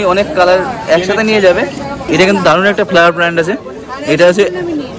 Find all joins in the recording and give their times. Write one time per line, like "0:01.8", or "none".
0:02.0